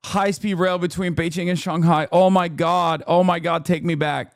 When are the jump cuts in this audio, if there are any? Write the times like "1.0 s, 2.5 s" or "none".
none